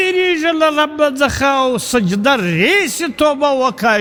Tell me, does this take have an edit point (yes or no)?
no